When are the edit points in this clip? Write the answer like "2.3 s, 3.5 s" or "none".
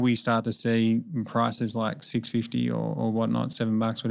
none